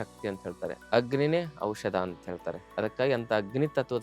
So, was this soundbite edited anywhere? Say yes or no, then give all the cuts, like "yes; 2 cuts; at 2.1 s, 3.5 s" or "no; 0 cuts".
yes; 2 cuts; at 0.8 s, 2.6 s